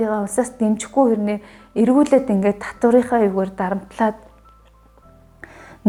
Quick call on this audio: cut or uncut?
uncut